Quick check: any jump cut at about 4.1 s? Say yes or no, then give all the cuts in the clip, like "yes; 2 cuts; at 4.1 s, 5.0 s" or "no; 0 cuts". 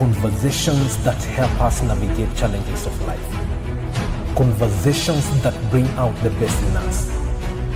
no; 0 cuts